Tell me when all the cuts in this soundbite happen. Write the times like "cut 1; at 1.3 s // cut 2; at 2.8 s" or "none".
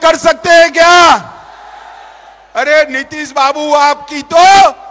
none

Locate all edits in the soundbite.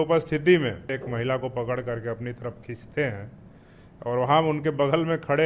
cut 1; at 0.9 s

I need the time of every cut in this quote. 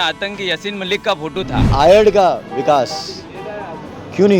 cut 1; at 1.7 s

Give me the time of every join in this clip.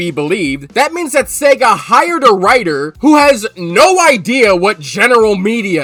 none

